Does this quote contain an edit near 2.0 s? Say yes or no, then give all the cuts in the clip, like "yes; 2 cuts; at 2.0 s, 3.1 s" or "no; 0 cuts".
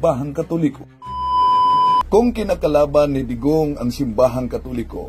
yes; 1 cut; at 2.0 s